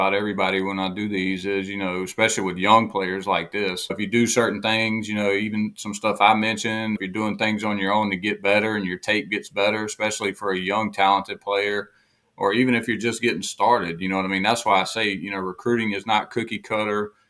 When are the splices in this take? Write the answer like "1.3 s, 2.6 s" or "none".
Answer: 3.9 s, 7.0 s